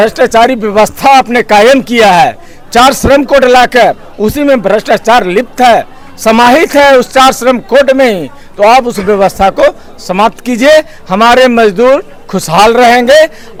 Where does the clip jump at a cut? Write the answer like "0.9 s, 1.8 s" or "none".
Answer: none